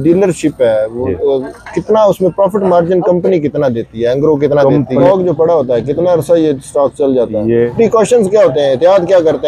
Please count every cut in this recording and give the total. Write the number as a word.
two